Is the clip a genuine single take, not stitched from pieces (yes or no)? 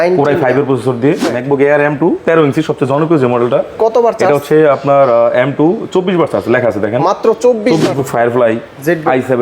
no